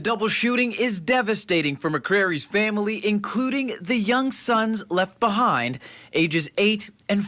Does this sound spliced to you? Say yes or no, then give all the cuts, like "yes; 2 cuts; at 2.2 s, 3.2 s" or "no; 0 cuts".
no; 0 cuts